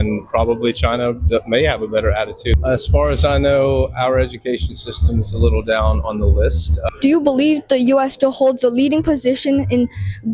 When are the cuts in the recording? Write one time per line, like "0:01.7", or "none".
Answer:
0:02.5
0:06.9